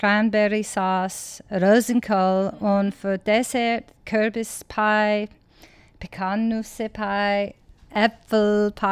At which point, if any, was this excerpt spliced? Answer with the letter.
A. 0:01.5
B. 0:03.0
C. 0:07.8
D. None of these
C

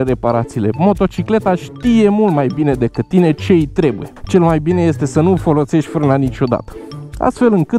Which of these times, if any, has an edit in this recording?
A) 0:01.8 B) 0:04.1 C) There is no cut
B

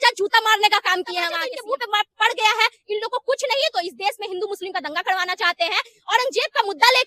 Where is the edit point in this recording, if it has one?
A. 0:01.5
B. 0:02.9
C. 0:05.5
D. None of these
A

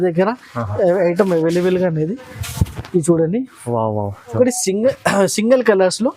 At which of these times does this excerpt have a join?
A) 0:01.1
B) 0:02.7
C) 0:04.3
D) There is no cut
C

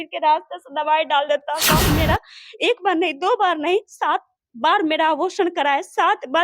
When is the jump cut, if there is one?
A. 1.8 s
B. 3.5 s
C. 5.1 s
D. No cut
A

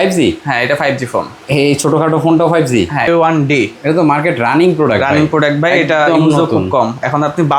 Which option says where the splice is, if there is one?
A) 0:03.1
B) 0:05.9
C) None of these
A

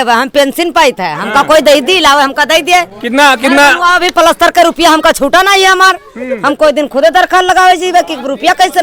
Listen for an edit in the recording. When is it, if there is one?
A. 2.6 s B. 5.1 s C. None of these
C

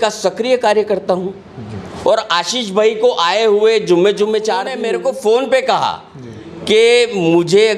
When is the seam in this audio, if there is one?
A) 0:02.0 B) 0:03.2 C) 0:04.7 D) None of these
C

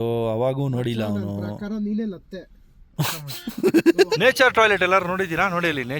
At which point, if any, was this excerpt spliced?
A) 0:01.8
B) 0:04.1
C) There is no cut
B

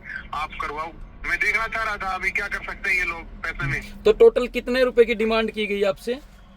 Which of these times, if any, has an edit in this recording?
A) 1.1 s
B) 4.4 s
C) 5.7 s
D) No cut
D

